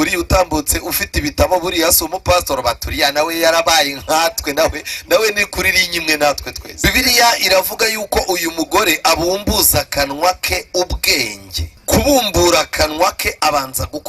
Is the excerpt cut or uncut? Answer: cut